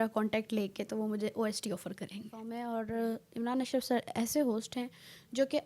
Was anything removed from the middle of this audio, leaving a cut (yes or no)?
yes